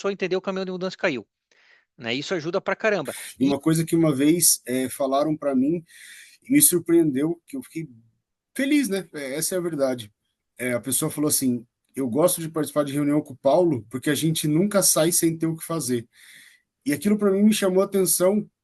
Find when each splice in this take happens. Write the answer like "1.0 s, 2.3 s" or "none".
3.2 s